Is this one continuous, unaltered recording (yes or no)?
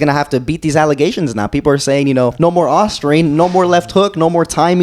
no